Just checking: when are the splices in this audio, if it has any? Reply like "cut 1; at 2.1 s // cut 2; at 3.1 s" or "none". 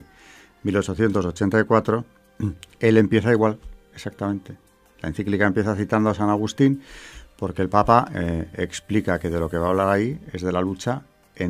none

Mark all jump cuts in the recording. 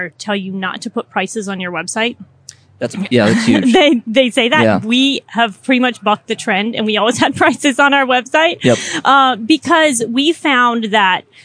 none

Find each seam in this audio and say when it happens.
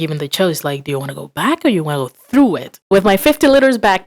cut 1; at 2.7 s

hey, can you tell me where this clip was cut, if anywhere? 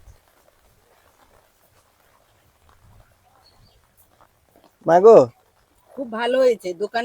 none

